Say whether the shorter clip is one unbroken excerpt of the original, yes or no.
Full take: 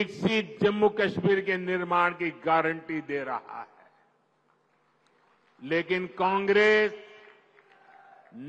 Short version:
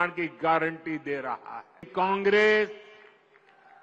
no